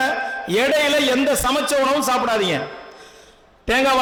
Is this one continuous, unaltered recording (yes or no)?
yes